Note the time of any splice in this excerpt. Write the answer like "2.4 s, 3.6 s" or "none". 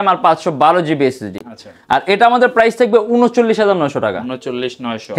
none